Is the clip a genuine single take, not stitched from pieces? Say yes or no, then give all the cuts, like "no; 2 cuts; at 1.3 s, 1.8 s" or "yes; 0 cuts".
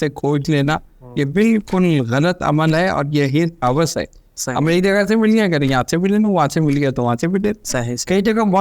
yes; 0 cuts